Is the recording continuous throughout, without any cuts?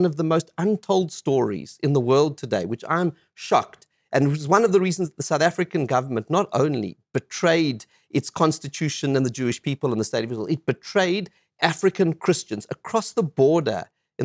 yes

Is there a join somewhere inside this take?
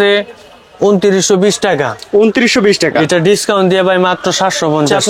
no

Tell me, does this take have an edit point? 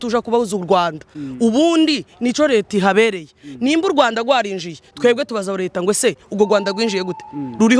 no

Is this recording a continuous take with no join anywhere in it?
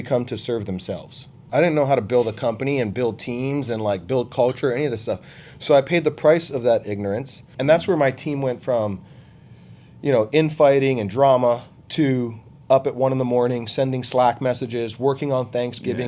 no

